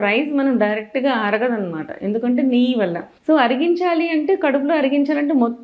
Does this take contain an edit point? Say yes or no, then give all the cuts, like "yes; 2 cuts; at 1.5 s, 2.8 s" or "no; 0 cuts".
yes; 1 cut; at 3.1 s